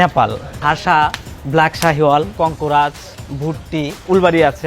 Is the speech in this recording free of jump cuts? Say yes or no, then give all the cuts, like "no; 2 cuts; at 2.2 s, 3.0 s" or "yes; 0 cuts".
no; 2 cuts; at 0.8 s, 2.3 s